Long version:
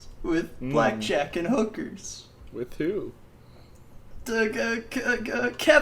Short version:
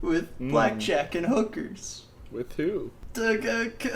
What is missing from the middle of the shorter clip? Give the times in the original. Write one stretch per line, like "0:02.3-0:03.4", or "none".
0:03.2-0:04.1